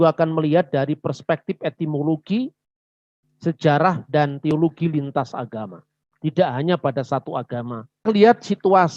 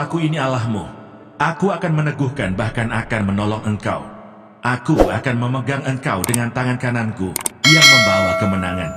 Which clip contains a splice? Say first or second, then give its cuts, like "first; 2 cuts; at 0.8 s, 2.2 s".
first; 1 cut; at 8.0 s